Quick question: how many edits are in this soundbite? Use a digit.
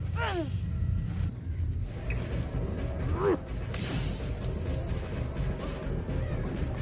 1